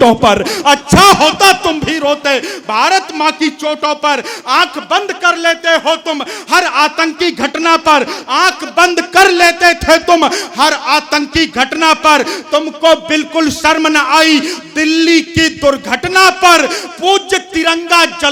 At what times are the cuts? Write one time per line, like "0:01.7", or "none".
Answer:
none